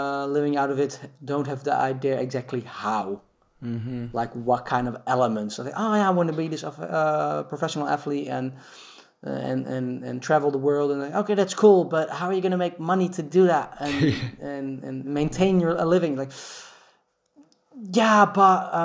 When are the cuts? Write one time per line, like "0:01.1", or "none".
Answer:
none